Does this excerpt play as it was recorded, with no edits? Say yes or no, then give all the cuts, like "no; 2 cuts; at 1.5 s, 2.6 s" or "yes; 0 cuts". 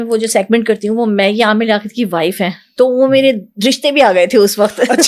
yes; 0 cuts